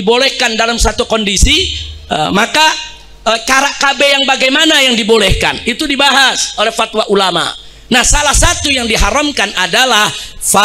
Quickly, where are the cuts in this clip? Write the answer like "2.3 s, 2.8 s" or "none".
none